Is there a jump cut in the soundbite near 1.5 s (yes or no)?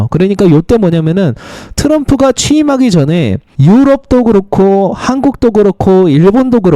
no